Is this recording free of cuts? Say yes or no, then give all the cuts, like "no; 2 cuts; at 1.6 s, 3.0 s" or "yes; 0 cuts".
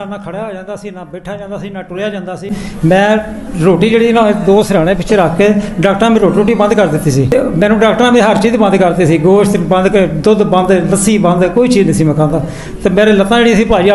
no; 1 cut; at 2.6 s